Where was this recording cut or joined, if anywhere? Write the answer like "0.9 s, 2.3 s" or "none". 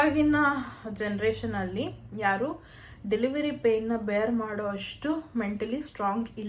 none